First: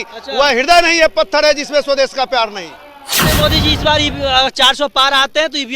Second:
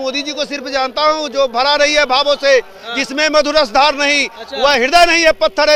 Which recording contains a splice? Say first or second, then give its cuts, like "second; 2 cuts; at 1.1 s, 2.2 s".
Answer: first; 1 cut; at 3.2 s